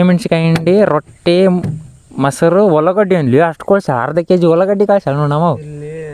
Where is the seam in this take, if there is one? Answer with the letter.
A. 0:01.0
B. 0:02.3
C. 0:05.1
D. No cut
D